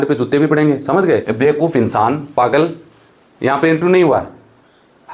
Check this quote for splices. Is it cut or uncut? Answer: cut